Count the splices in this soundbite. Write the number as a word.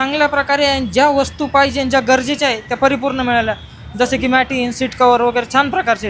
zero